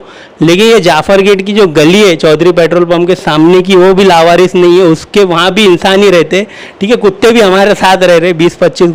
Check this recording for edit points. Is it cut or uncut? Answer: uncut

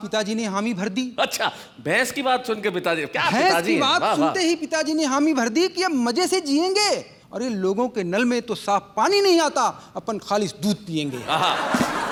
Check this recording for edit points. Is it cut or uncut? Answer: uncut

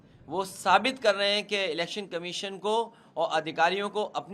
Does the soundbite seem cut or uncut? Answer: uncut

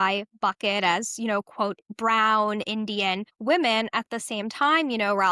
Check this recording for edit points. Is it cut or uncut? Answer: cut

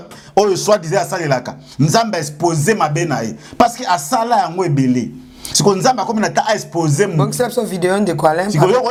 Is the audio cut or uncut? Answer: uncut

